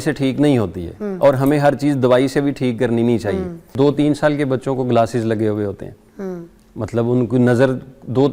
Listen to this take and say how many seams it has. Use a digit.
1